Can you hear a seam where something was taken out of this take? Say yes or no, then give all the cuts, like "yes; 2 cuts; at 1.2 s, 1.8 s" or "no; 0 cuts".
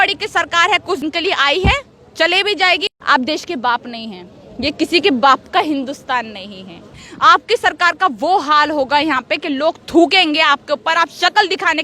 yes; 3 cuts; at 1.0 s, 2.9 s, 6.9 s